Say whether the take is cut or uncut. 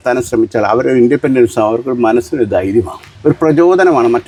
uncut